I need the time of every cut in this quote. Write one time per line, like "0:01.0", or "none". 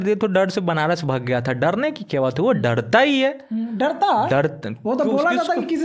none